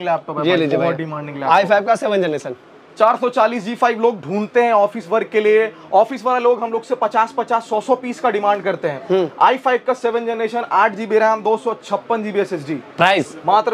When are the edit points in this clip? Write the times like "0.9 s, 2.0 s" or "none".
none